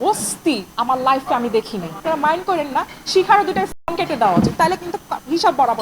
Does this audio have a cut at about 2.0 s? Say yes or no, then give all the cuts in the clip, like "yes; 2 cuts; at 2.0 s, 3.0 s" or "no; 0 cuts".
yes; 1 cut; at 2.0 s